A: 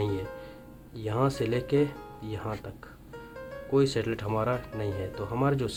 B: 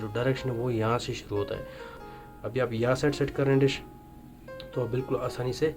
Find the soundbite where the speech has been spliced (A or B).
B